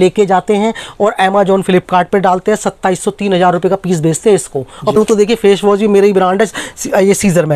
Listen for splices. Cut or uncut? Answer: cut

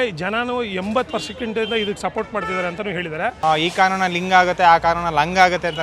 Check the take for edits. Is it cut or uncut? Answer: cut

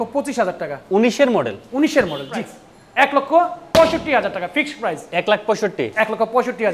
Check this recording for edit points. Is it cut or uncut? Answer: cut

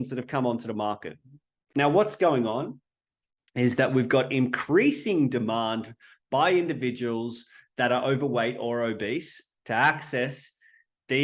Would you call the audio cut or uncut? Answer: cut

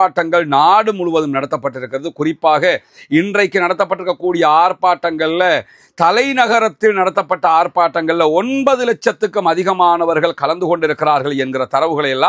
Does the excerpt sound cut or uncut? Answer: uncut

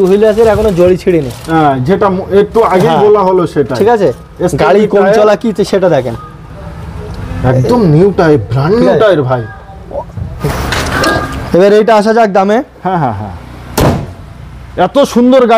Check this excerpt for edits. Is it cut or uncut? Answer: cut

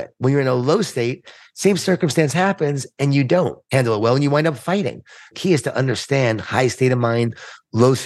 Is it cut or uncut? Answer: cut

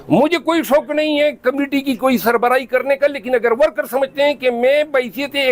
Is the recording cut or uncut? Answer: uncut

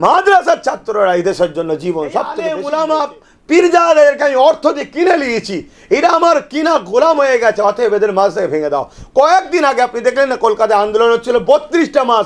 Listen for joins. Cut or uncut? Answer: cut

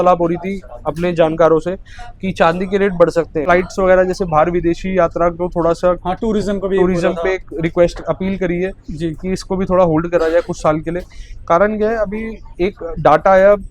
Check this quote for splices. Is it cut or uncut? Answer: cut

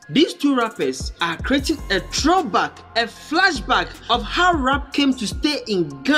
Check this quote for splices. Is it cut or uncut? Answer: uncut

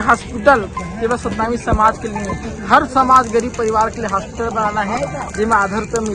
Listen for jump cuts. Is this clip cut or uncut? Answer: uncut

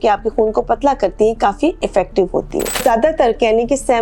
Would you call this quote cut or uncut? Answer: cut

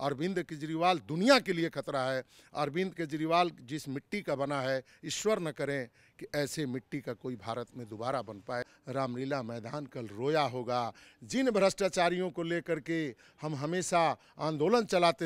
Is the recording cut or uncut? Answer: cut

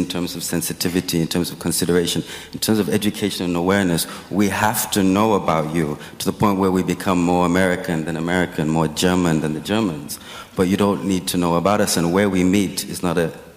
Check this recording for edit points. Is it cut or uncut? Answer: uncut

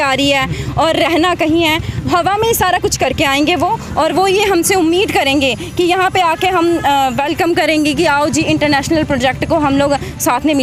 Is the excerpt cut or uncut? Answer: uncut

